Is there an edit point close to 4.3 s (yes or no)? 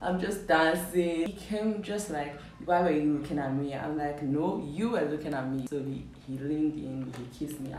no